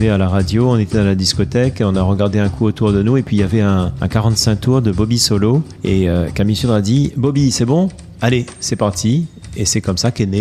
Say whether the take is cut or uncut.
uncut